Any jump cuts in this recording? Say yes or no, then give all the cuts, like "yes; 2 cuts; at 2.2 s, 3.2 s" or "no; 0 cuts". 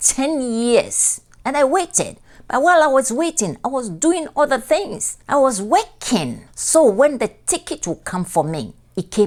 no; 0 cuts